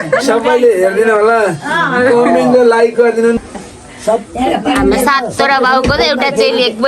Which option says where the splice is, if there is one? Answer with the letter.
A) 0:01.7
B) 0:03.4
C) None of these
B